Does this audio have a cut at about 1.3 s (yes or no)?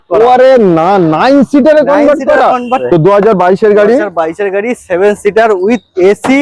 no